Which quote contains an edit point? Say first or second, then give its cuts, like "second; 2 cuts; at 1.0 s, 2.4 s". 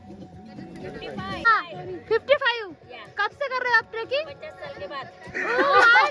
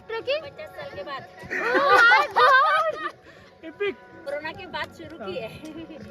second; 1 cut; at 4.3 s